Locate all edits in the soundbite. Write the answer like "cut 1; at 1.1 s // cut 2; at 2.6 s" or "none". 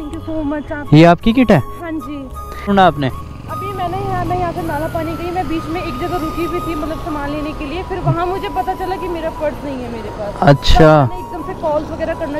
cut 1; at 2.7 s